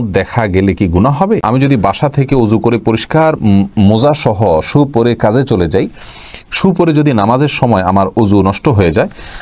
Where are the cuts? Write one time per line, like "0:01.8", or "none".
0:01.4